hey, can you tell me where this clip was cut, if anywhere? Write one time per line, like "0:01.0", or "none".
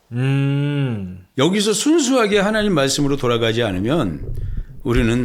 none